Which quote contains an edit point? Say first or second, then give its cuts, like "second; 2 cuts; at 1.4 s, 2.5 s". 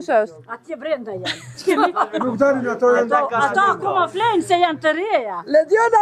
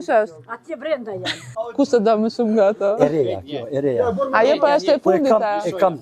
second; 1 cut; at 1.5 s